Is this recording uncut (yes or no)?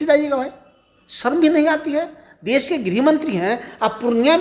yes